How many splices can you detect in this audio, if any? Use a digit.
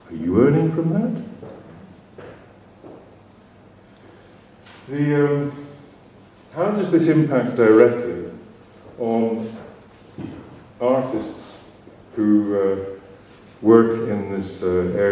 0